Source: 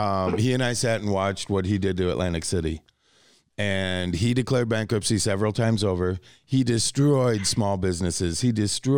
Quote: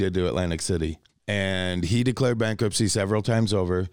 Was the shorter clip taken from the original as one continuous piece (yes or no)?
no